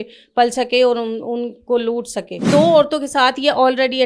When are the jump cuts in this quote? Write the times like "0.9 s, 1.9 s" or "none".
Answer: 2.5 s